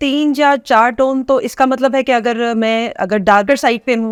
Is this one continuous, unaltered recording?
yes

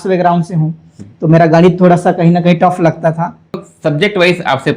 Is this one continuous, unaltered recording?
no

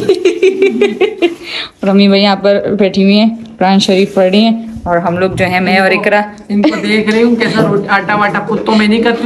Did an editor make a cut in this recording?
no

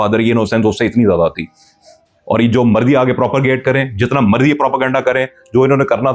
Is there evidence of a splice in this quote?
no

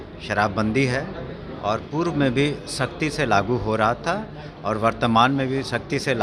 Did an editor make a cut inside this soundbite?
no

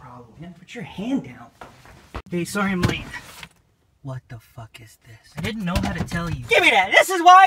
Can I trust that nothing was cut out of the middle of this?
yes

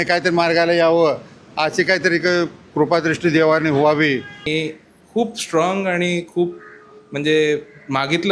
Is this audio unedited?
no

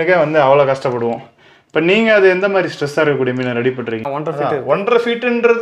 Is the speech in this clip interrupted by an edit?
yes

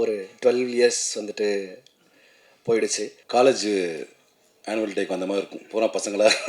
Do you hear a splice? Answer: yes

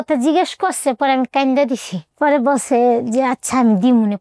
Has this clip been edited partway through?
no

